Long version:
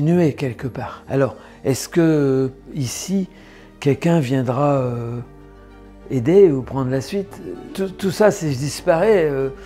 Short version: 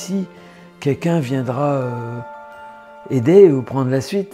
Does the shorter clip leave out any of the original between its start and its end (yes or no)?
no